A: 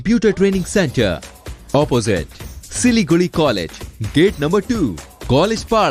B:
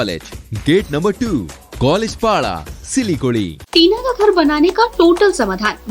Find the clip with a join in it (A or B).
B